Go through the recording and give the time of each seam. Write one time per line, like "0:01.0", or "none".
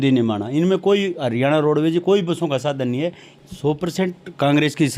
0:03.2